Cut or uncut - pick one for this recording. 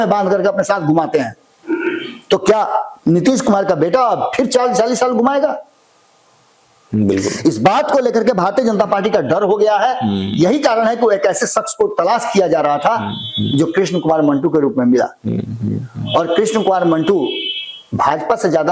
uncut